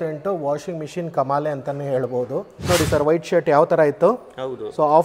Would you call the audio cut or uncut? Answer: uncut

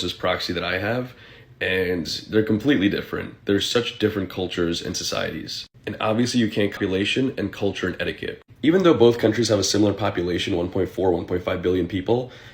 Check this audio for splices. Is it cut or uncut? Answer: cut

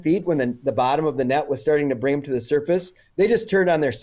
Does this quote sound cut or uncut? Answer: uncut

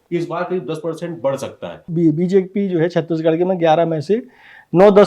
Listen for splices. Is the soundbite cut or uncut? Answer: cut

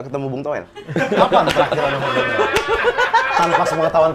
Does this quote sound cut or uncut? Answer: uncut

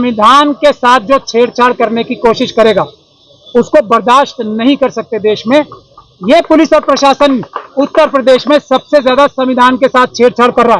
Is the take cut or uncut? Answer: uncut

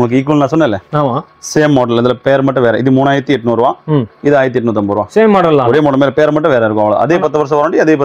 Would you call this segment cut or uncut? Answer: uncut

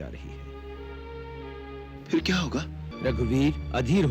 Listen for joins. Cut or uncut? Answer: cut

